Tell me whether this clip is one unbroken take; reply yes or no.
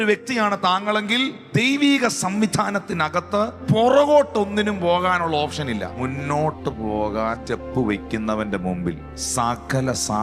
no